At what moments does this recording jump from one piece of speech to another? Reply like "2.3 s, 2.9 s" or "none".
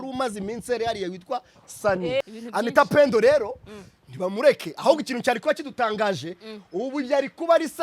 2.2 s